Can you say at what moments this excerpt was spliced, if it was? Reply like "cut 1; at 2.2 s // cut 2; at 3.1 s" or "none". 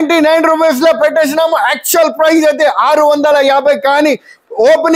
none